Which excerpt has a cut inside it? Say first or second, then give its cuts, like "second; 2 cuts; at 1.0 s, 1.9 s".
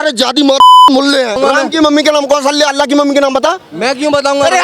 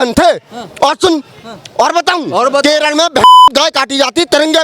first; 1 cut; at 1.4 s